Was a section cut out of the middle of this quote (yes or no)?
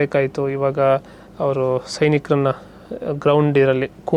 no